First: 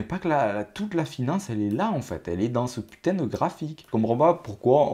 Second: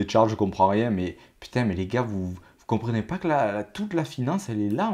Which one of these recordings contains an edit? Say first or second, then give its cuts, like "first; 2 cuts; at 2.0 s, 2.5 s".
first; 1 cut; at 3.7 s